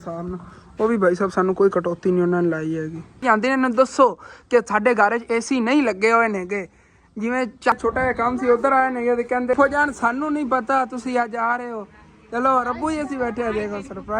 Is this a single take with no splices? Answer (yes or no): no